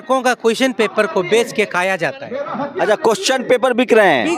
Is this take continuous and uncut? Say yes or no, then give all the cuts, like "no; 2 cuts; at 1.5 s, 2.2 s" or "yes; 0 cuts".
yes; 0 cuts